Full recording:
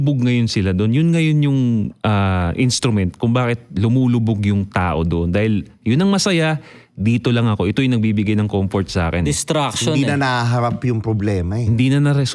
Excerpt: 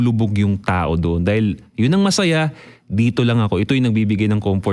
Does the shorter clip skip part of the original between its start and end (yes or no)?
no